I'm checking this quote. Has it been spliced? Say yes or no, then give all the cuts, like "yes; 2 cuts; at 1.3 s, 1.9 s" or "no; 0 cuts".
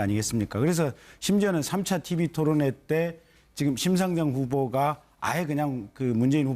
yes; 1 cut; at 2.5 s